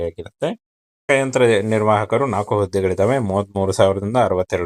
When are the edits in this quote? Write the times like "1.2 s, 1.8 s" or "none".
1.0 s